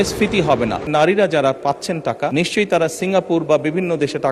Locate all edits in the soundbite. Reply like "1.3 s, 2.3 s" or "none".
0.9 s, 2.3 s